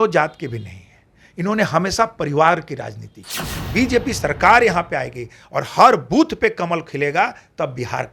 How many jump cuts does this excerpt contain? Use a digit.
1